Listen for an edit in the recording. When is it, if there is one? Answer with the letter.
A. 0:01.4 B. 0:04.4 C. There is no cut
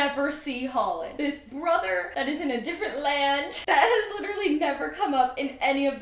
C